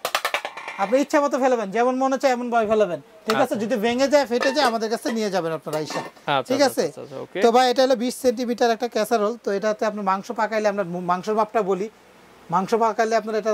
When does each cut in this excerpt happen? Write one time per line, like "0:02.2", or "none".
none